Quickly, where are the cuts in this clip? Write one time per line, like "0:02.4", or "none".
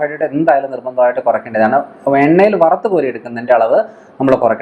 none